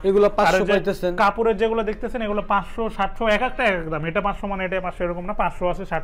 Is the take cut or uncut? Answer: uncut